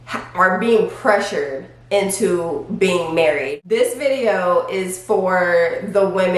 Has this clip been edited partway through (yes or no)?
yes